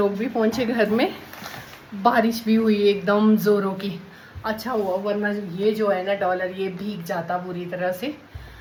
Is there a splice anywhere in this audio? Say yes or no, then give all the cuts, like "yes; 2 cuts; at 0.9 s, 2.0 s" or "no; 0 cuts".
no; 0 cuts